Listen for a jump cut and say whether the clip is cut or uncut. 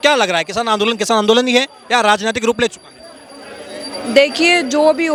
uncut